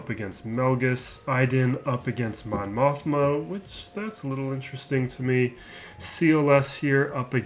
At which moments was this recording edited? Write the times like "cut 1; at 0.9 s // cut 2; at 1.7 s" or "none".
cut 1; at 1.1 s